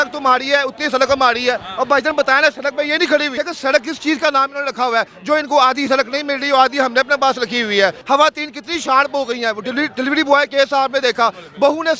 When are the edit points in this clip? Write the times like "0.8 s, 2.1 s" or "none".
3.3 s, 8.0 s